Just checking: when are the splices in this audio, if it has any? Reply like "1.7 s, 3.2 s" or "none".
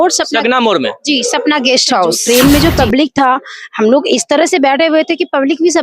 2.2 s

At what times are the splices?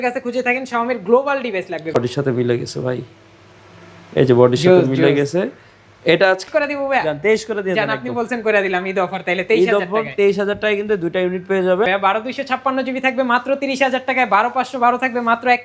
1.9 s, 6.4 s, 11.9 s

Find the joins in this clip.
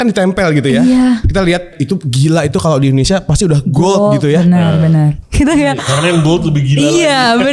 1.8 s, 5.2 s

